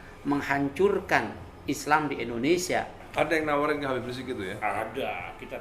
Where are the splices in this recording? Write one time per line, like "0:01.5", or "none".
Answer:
0:03.0